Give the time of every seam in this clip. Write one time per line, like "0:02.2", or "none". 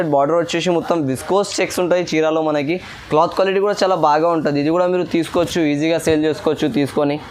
none